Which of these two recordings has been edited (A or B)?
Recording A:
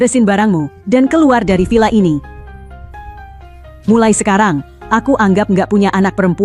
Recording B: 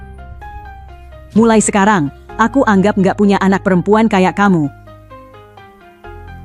B